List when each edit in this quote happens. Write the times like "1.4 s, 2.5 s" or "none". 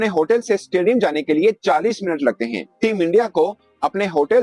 none